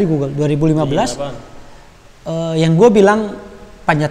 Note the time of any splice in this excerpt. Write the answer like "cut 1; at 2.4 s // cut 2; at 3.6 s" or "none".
none

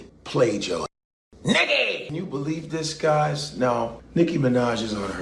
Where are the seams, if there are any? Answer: none

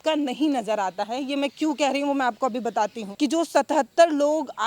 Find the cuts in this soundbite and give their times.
cut 1; at 3.0 s

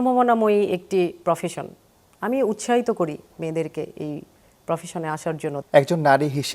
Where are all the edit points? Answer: cut 1; at 5.6 s

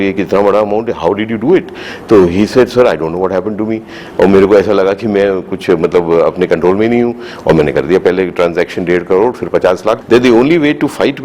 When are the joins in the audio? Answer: cut 1; at 10.0 s

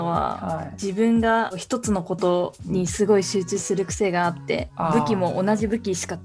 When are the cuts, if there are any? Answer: none

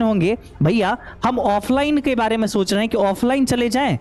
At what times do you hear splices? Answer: none

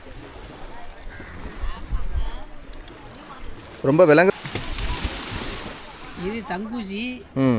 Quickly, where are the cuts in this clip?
cut 1; at 4.3 s

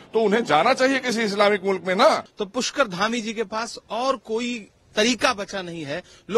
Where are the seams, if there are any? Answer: cut 1; at 2.4 s

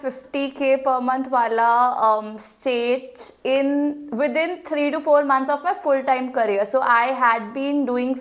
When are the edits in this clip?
none

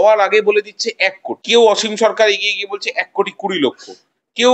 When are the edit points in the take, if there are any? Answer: cut 1; at 1.3 s

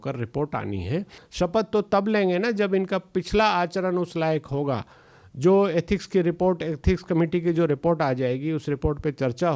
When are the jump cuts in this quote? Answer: cut 1; at 1.2 s

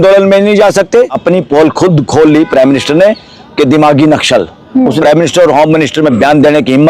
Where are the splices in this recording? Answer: cut 1; at 1.2 s // cut 2; at 4.9 s

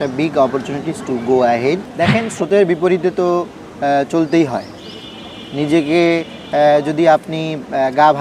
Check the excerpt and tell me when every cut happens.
cut 1; at 1.9 s

